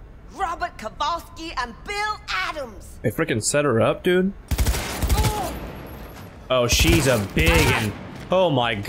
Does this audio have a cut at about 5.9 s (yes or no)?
no